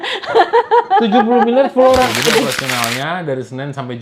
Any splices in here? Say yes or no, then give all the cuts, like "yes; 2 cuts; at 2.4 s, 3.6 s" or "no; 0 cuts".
yes; 1 cut; at 2.5 s